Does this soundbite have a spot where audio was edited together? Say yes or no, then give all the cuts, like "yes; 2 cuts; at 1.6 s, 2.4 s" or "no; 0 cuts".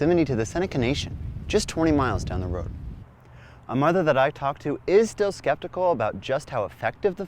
yes; 1 cut; at 2.9 s